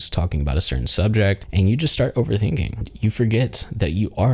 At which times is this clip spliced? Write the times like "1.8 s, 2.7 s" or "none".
1.4 s, 2.9 s